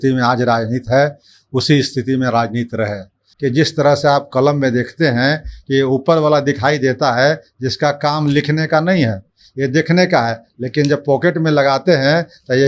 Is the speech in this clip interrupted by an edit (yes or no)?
yes